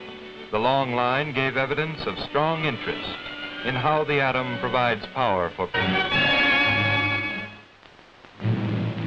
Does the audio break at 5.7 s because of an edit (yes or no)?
no